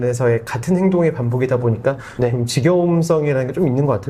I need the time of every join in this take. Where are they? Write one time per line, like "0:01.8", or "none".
none